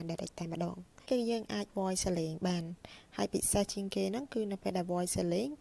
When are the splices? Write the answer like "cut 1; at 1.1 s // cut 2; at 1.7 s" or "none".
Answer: cut 1; at 1.1 s